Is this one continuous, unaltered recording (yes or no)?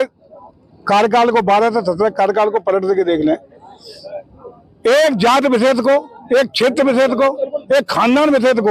yes